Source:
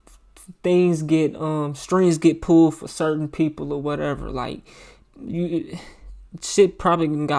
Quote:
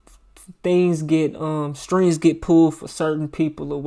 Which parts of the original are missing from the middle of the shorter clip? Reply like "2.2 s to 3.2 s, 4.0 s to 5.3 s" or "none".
none